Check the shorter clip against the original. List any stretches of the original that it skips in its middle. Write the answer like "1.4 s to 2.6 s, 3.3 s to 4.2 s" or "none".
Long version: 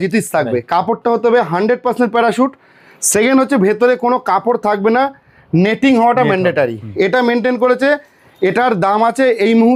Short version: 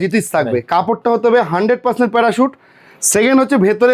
none